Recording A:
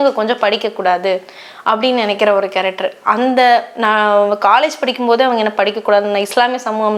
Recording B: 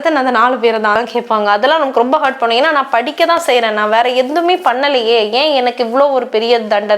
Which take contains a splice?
B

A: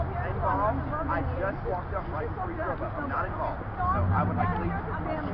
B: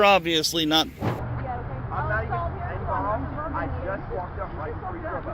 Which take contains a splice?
B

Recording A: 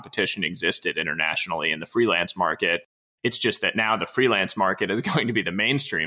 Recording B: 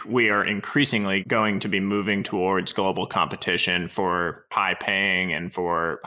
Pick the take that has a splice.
B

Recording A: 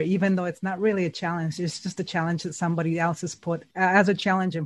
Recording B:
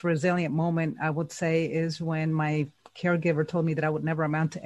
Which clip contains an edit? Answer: A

